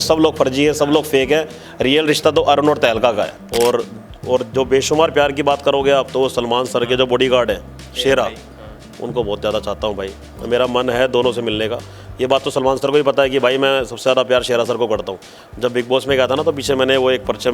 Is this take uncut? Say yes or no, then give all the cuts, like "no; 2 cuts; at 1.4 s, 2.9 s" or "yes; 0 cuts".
no; 1 cut; at 3.4 s